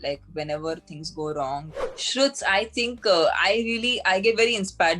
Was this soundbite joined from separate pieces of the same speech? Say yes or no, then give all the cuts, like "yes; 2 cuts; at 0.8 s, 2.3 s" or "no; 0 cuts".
yes; 1 cut; at 1.7 s